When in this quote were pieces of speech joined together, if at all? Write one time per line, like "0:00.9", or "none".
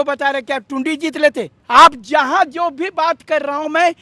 0:01.5